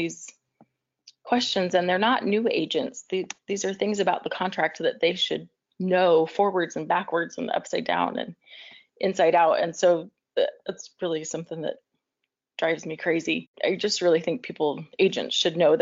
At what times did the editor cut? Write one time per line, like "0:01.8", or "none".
0:13.5